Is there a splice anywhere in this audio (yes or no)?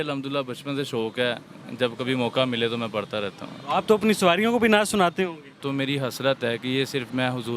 yes